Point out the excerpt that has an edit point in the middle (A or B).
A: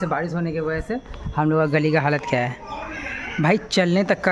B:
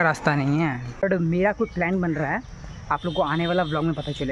B